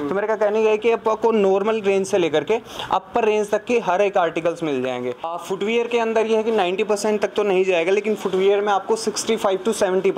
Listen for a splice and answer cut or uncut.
cut